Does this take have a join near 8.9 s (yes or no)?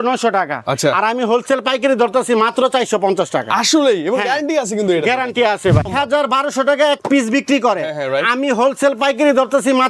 no